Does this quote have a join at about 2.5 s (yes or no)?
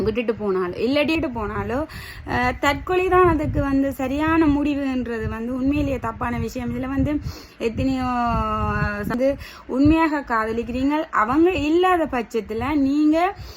no